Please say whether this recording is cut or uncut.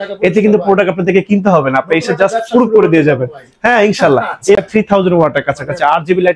cut